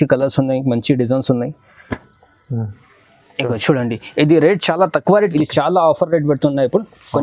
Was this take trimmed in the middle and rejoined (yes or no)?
yes